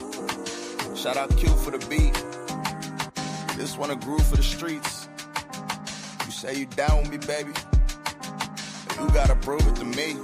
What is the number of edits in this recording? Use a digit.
1